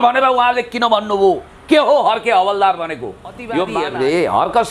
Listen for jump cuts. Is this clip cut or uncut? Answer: cut